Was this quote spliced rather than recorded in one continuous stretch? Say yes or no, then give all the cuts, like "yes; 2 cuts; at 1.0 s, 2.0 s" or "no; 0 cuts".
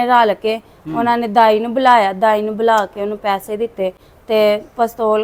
no; 0 cuts